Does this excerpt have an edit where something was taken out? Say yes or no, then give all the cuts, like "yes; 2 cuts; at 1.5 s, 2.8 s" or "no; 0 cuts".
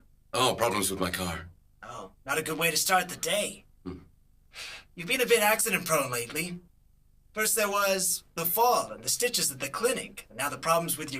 yes; 1 cut; at 5.3 s